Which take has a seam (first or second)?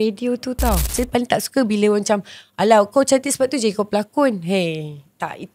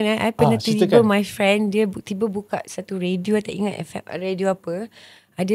first